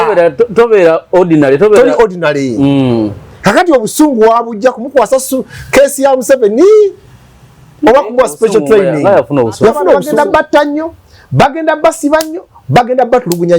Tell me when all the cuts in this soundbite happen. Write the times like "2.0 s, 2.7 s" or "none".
10.1 s

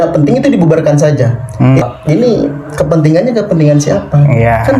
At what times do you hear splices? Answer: 1.8 s

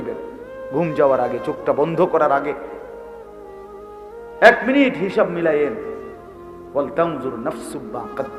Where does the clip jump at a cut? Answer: none

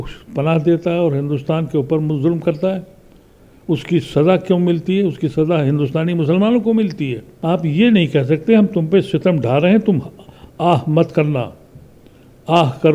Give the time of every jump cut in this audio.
7.3 s

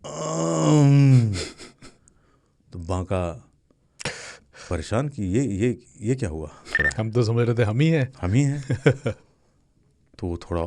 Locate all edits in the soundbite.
6.8 s

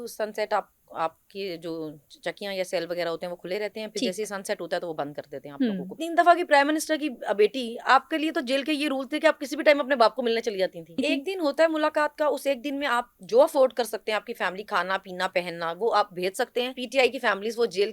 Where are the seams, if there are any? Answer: 6.0 s, 11.0 s, 16.8 s

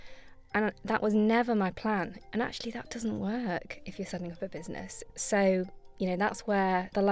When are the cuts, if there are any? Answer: 2.2 s, 5.0 s

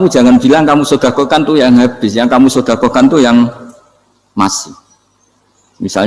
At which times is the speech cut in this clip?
none

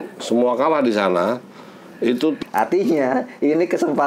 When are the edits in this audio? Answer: 2.4 s

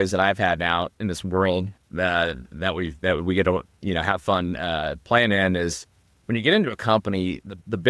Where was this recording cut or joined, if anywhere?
0.9 s

